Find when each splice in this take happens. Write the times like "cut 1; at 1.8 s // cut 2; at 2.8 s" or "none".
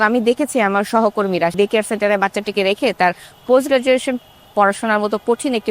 cut 1; at 1.5 s